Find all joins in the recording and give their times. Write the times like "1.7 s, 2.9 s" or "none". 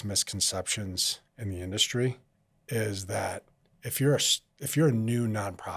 none